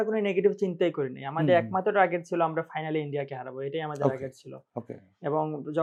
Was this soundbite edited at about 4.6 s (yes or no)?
no